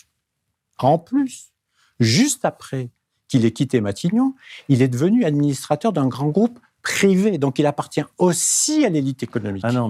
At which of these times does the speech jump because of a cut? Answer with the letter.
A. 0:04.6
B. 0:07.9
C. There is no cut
C